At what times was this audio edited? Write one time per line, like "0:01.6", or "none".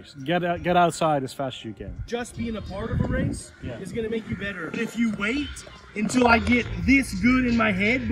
0:02.1
0:04.8